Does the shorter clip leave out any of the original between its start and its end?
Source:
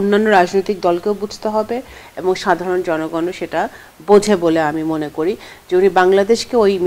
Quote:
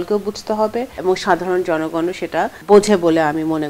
yes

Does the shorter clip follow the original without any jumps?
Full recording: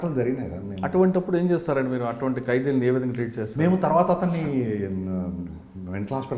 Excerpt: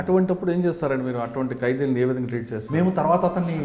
yes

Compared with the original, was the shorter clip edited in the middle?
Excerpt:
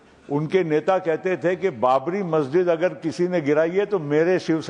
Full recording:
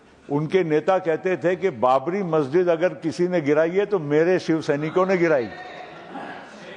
no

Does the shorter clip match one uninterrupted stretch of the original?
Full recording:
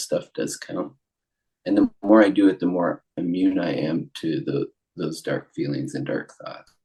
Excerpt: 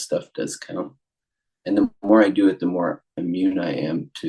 yes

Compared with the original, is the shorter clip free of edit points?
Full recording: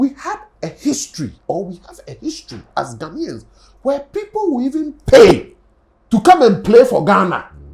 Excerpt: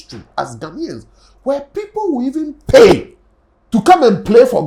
yes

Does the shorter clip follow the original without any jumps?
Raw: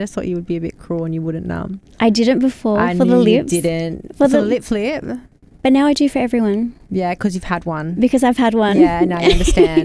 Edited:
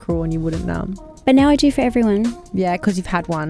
no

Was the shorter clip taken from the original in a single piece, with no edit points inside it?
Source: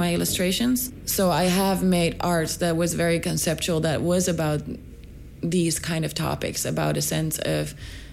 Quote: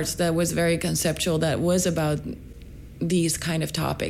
yes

